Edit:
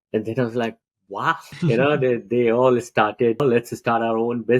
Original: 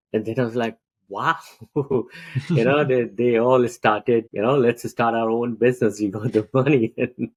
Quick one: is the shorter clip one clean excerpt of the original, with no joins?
no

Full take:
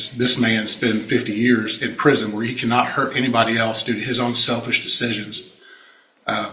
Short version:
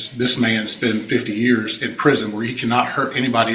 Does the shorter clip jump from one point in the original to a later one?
no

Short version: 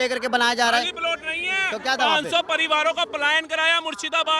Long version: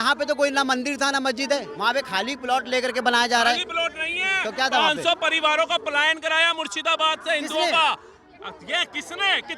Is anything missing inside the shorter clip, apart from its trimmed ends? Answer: no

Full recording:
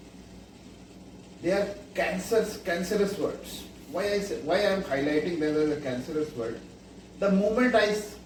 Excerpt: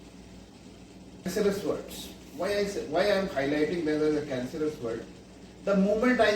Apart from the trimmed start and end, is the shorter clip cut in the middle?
yes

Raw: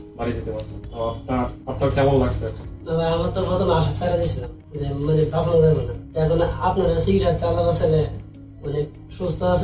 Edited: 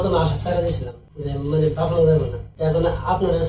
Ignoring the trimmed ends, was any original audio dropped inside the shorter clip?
no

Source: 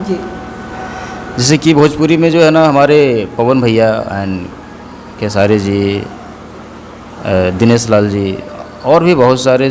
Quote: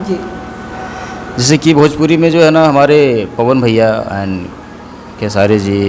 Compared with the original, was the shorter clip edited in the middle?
no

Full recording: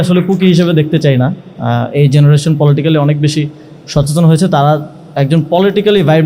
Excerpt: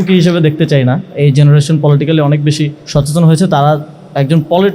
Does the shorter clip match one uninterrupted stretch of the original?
no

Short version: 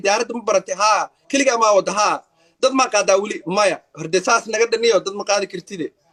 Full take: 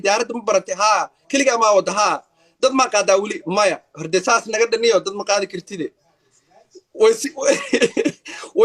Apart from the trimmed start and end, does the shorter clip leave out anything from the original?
no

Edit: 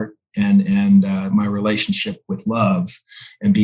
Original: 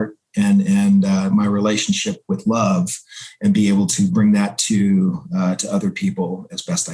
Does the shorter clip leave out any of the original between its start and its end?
no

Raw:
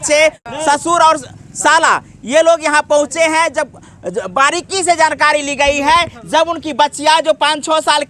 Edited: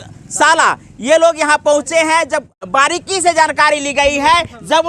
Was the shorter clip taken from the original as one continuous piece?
no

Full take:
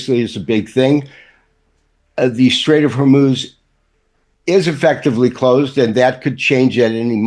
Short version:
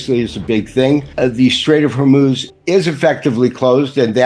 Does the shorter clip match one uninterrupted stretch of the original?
no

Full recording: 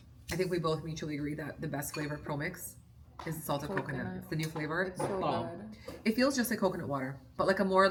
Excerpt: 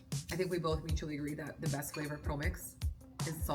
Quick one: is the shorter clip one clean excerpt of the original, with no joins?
yes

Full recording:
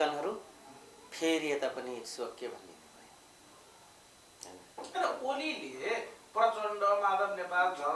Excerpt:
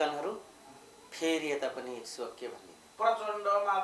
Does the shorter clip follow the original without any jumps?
no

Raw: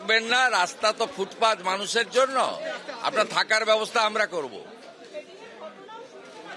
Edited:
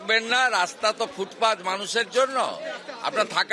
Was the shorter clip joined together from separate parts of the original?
no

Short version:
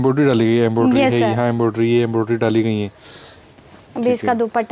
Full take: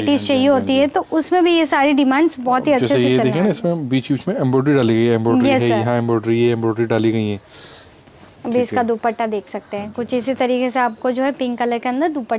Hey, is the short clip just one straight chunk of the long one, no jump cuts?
yes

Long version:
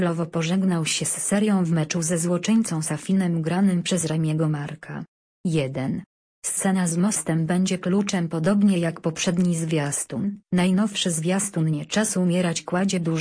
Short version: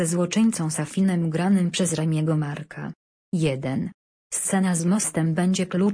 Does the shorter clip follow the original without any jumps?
yes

